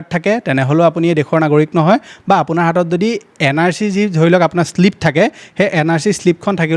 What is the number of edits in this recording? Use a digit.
0